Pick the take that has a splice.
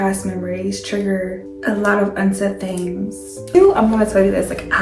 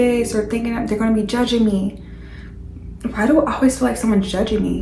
first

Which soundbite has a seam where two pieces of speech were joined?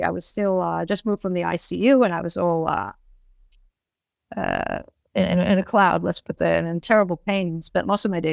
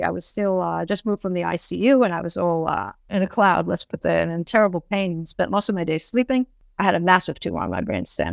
second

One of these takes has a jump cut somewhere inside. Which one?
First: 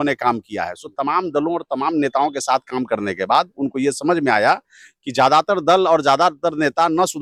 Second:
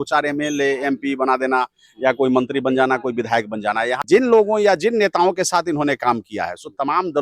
second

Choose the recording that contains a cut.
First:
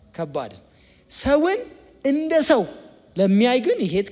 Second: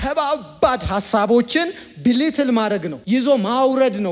second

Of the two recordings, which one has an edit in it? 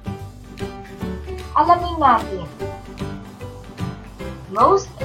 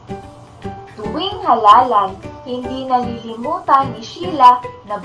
first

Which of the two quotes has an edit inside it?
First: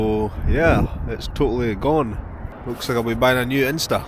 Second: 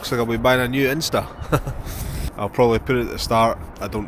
second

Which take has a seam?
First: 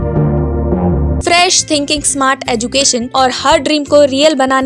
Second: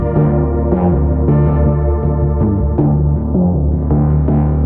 first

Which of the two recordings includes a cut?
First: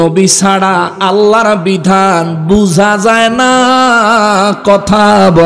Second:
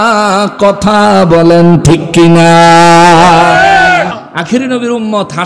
second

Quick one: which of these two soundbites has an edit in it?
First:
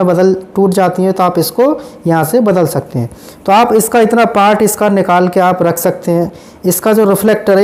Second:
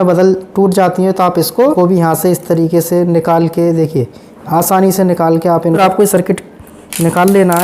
second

